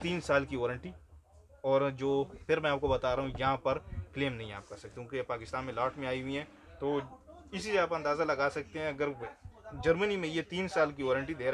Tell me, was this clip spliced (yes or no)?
no